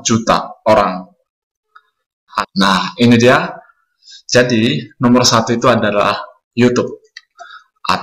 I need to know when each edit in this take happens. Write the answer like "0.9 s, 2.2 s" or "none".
2.4 s